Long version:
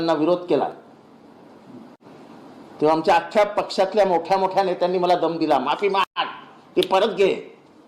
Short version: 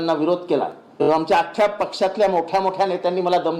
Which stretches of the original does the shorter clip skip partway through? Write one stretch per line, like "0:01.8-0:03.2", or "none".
0:01.1-0:02.8